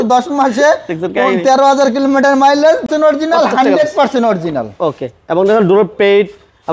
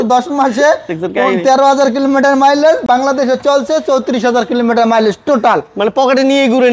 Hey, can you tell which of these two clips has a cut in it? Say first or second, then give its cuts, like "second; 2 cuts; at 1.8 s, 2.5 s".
first; 1 cut; at 2.9 s